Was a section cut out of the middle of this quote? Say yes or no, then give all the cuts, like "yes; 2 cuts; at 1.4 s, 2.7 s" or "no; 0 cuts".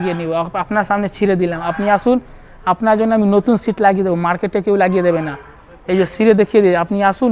no; 0 cuts